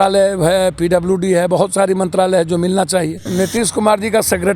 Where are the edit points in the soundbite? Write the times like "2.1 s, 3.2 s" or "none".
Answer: 3.2 s